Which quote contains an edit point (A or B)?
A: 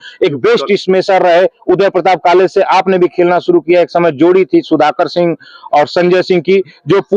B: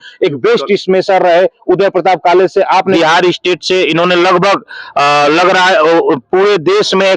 B